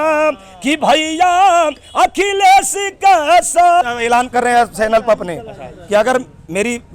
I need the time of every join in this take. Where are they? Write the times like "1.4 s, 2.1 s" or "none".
3.8 s